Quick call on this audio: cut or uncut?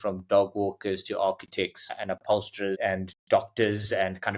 cut